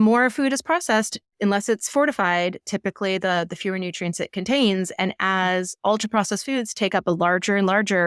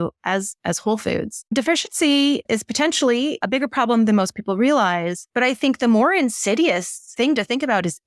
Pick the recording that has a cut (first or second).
second